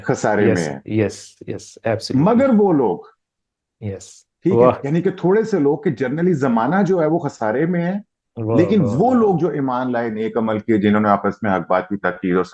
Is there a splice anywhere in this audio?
no; 0 cuts

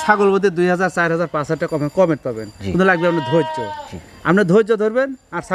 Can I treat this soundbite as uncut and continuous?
yes; 0 cuts

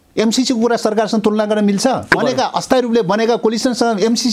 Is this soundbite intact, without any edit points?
no; 1 cut; at 2.2 s

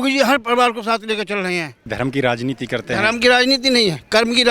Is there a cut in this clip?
yes; 1 cut; at 1.9 s

